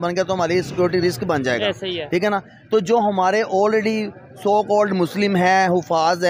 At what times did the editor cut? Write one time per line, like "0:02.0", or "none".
none